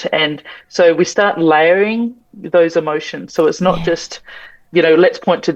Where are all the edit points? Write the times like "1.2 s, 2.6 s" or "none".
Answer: none